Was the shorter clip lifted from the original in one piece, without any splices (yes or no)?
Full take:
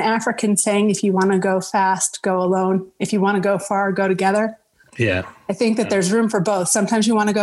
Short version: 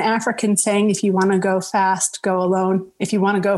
yes